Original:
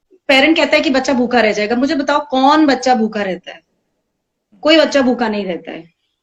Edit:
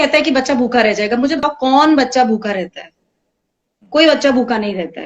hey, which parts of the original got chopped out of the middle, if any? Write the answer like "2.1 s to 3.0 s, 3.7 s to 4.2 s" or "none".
2.0 s to 2.1 s